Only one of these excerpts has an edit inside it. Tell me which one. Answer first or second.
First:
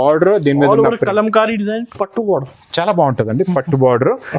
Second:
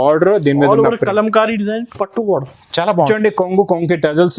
second